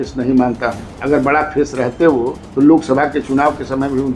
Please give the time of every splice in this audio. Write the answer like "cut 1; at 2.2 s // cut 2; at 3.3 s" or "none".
cut 1; at 0.9 s // cut 2; at 2.4 s